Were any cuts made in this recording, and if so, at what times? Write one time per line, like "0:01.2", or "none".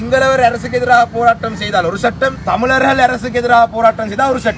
0:02.4